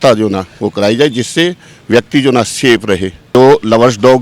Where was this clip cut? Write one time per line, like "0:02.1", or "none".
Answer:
0:03.2